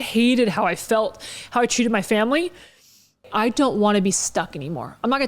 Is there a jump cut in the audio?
yes; 1 cut; at 3.3 s

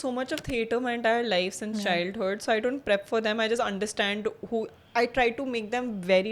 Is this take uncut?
yes; 0 cuts

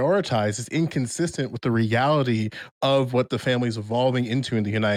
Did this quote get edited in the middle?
no; 0 cuts

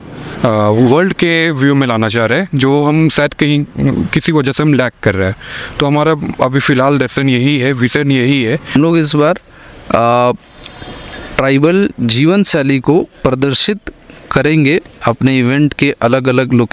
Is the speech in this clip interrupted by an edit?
yes; 1 cut; at 8.7 s

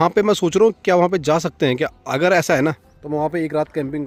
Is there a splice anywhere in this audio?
no; 0 cuts

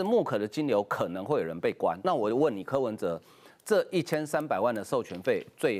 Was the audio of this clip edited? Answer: yes; 1 cut; at 2.0 s

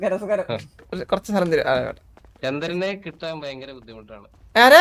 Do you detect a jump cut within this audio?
no; 0 cuts

